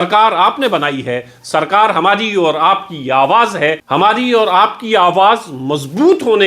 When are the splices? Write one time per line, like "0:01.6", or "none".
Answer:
0:03.8

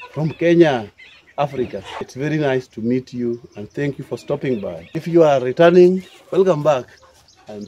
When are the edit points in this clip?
0:02.0
0:04.8

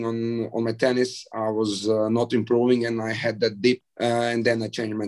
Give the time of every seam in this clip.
0:03.8

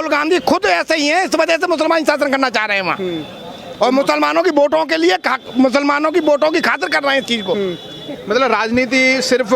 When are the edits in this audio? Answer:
none

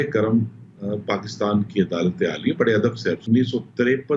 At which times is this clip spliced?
0:03.2

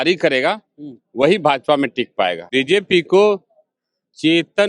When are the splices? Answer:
0:02.4

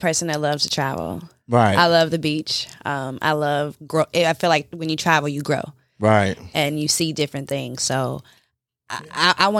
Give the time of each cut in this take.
none

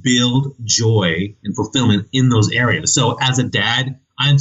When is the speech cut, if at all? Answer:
none

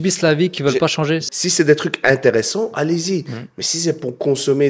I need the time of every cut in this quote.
0:01.4

